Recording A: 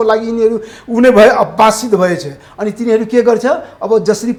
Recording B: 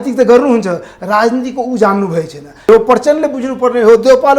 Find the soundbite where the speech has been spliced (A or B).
B